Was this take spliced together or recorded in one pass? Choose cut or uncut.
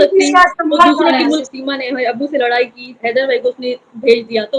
cut